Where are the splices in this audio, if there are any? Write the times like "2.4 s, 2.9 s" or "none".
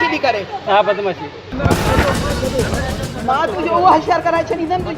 1.3 s